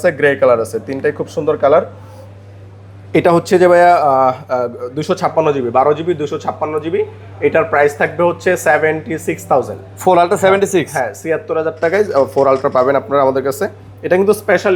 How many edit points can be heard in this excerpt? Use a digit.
0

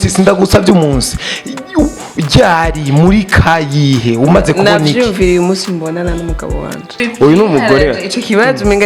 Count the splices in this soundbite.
1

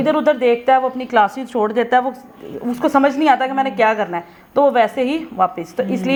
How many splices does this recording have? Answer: 0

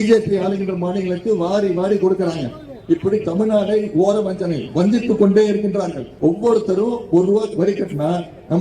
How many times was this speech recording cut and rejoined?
1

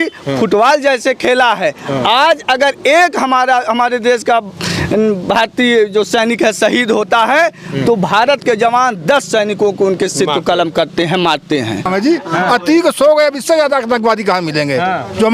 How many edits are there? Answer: 1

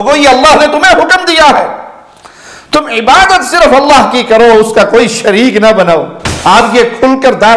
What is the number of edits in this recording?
1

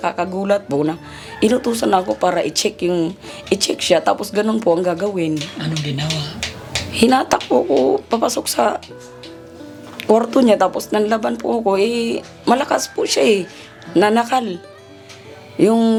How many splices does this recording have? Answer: 0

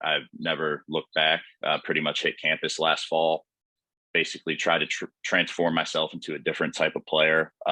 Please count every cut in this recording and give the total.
0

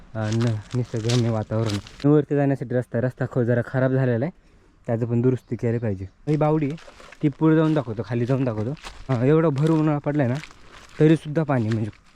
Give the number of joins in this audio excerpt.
3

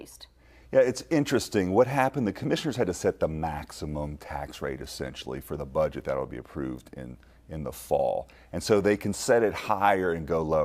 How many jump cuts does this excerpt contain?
1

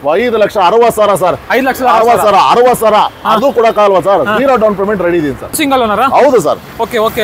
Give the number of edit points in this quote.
1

